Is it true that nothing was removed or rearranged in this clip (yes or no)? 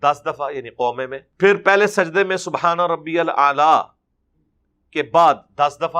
no